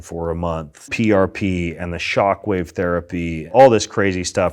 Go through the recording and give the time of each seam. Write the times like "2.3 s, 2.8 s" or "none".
0.8 s, 3.5 s